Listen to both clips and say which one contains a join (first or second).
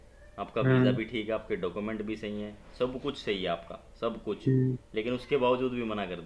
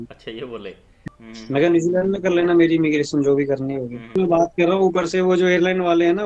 second